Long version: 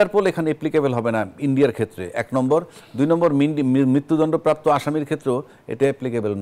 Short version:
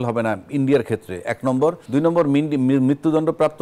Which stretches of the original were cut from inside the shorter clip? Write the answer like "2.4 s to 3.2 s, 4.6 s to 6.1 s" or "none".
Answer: 2.7 s to 2.9 s